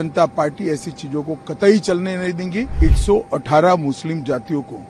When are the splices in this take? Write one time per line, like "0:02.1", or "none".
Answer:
0:02.8